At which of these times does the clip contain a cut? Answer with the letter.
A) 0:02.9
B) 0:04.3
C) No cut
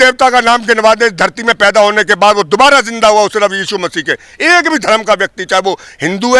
C